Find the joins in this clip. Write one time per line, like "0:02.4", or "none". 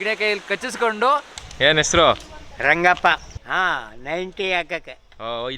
0:01.2
0:03.3